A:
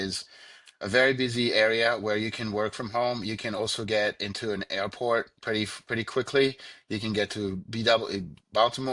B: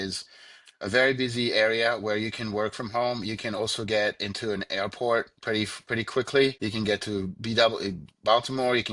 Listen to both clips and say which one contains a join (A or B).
B